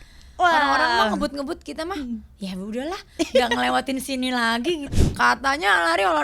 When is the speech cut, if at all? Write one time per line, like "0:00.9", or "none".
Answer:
0:04.9